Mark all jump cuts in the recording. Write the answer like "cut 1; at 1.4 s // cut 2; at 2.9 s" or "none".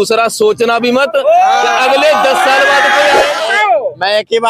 cut 1; at 3.3 s